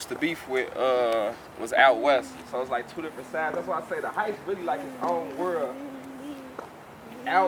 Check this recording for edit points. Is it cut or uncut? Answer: uncut